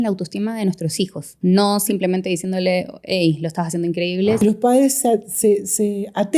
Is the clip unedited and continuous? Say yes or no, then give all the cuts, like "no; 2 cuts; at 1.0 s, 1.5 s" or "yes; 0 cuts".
no; 2 cuts; at 1.3 s, 4.4 s